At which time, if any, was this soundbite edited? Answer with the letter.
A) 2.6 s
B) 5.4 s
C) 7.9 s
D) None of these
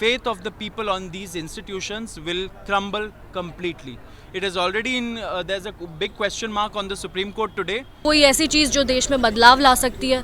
C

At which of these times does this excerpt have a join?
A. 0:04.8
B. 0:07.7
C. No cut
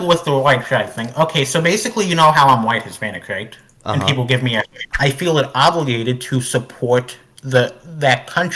A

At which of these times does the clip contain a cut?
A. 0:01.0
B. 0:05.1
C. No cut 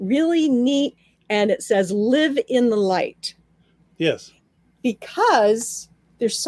A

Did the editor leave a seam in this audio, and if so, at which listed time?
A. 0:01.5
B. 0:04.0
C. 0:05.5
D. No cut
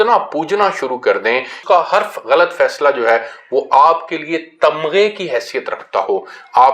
A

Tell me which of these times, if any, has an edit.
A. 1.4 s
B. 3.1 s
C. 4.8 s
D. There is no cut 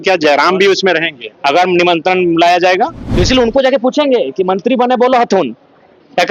B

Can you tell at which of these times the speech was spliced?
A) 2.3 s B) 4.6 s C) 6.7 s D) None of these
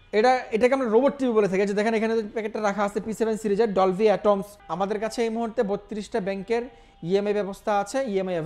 B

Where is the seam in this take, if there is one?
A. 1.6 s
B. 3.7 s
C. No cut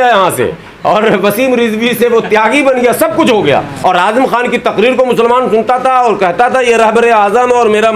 B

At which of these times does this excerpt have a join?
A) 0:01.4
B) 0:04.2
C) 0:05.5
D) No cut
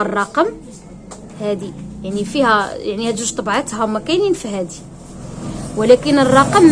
D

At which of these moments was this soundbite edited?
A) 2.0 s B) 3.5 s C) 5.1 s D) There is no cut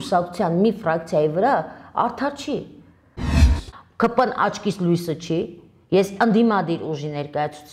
B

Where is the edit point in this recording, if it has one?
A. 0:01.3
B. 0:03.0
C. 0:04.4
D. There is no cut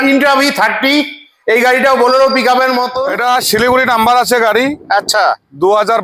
B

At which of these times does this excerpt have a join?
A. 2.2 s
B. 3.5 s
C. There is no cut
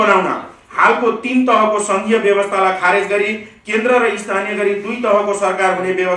C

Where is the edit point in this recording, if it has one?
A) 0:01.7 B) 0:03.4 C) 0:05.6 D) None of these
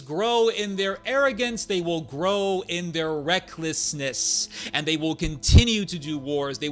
D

